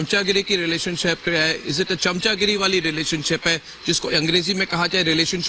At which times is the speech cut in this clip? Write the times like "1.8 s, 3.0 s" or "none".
none